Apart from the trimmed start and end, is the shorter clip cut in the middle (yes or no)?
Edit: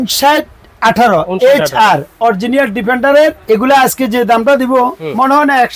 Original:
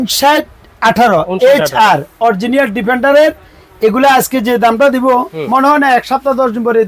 yes